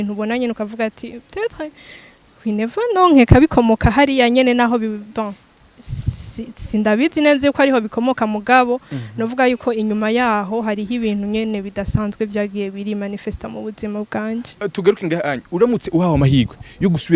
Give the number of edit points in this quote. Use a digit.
1